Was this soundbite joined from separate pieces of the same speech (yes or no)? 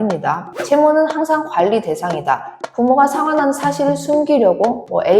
yes